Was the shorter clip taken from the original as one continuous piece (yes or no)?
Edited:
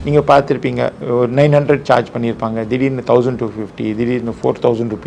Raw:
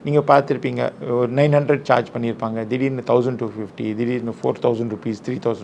yes